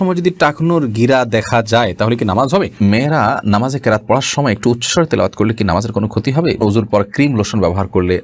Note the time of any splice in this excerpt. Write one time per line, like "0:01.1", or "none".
0:02.7
0:06.6

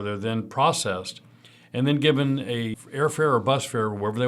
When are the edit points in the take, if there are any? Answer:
0:02.8

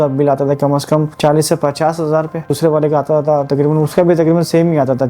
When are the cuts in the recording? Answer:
0:01.1
0:02.6

